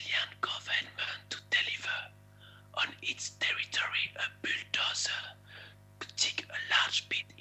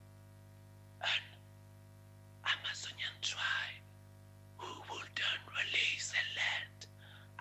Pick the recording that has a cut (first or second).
second